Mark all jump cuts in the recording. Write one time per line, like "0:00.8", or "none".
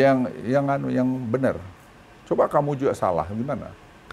none